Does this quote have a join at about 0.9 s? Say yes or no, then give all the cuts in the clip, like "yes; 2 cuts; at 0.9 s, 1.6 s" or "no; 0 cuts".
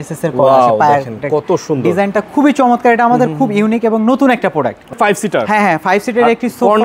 no; 0 cuts